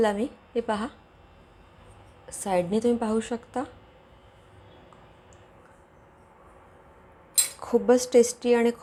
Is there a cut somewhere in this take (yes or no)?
no